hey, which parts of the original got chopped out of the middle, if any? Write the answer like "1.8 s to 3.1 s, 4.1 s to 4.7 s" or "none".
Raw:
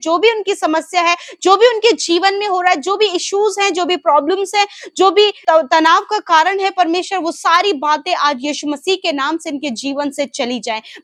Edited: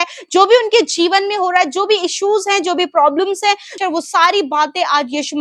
4.9 s to 7.1 s